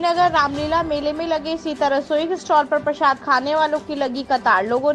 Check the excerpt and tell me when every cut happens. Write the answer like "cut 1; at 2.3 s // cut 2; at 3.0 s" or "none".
none

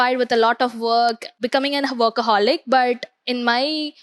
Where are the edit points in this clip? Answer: cut 1; at 1.4 s

